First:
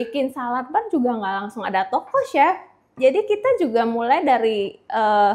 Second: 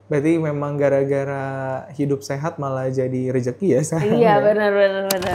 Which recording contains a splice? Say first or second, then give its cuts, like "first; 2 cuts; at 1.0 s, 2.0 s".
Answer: first; 1 cut; at 2.9 s